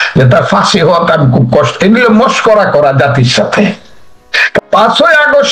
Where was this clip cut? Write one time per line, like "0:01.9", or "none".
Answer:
0:04.5